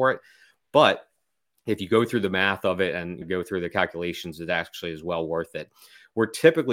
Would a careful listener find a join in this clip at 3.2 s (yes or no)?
yes